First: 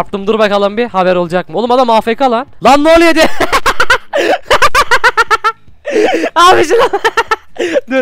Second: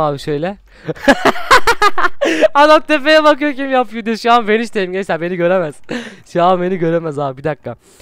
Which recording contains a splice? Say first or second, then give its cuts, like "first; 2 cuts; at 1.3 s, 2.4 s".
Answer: first; 1 cut; at 2.5 s